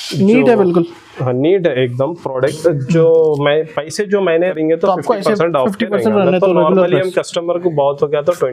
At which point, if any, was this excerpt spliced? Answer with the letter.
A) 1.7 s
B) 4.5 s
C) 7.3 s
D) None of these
B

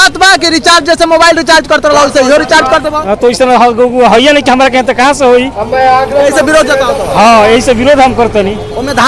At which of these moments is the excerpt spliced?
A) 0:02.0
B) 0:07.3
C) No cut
C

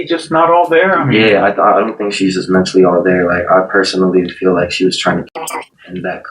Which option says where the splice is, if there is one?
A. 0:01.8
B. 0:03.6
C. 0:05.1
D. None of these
D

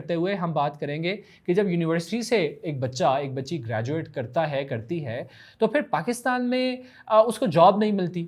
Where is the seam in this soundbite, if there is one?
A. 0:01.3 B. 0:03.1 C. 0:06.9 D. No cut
D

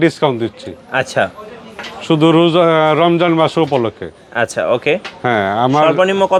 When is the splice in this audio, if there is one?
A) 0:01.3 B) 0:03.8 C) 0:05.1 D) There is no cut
D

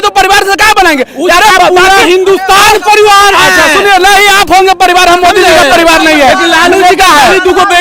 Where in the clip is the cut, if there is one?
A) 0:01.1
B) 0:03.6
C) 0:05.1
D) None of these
D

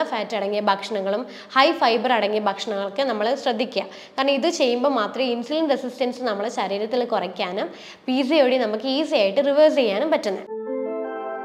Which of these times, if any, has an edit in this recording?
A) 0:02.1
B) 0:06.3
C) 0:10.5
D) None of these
C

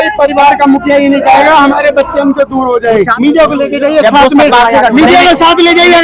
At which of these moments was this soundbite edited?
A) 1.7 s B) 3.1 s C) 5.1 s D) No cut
B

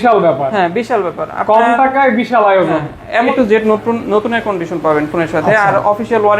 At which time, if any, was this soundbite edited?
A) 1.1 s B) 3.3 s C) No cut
B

